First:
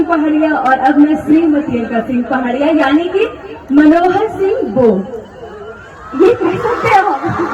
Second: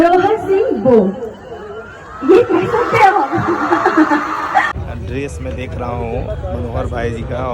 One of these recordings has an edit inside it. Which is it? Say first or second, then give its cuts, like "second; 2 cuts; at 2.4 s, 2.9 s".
second; 1 cut; at 4.7 s